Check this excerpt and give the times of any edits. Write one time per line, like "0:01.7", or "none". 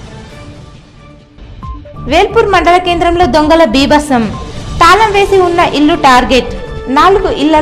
0:01.2